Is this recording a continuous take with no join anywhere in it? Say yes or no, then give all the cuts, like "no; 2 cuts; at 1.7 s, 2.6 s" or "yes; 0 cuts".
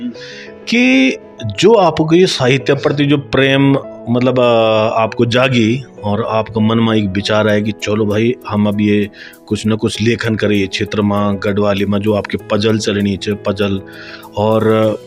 yes; 0 cuts